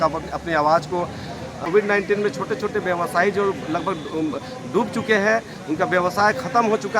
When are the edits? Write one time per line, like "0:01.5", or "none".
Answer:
0:01.6